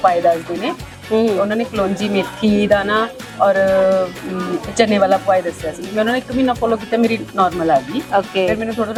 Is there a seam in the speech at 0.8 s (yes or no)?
no